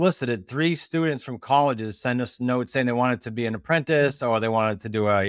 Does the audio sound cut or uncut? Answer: uncut